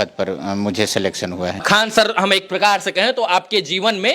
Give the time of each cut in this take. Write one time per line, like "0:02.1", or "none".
0:01.6